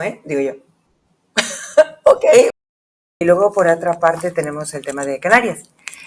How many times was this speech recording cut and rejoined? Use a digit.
1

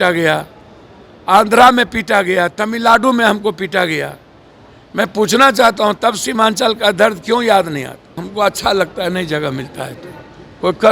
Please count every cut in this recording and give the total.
1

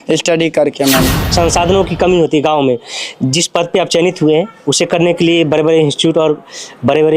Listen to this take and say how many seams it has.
1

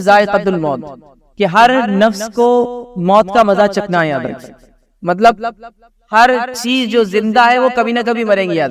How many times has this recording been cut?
0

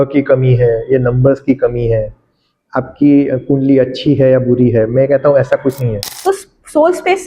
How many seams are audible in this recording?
1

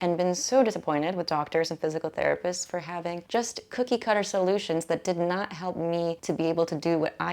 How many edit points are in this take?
2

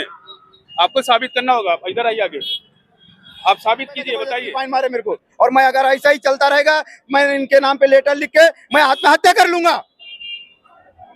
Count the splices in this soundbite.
1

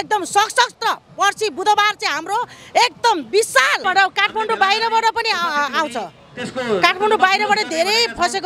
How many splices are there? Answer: 1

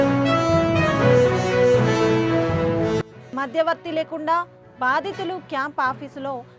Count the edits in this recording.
1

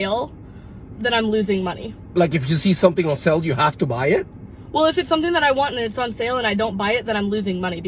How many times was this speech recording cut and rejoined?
1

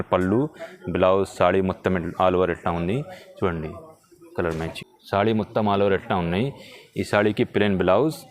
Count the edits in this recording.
1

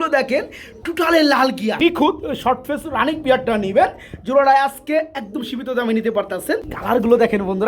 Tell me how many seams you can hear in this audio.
2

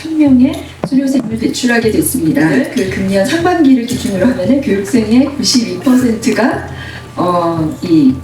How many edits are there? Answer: 1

